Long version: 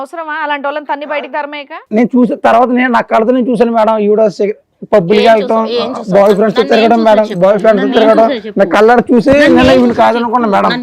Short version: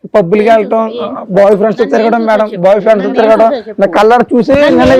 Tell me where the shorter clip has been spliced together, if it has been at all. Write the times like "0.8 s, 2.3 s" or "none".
none